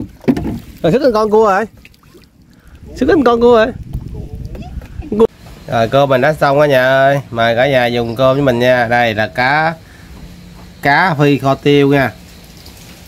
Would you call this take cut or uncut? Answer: cut